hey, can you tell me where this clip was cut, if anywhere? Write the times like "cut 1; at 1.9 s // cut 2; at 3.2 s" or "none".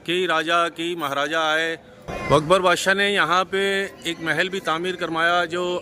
cut 1; at 2.0 s